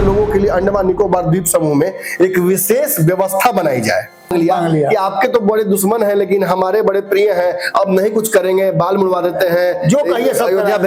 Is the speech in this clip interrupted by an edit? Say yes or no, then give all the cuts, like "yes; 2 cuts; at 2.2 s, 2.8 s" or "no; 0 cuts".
yes; 1 cut; at 4.3 s